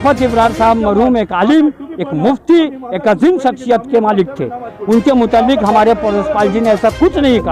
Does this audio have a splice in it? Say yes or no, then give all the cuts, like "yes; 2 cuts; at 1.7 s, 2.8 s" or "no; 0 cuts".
no; 0 cuts